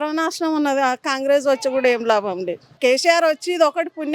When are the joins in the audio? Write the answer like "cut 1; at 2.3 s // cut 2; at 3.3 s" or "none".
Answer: cut 1; at 2.8 s